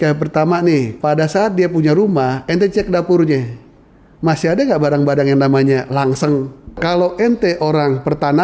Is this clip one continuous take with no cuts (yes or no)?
no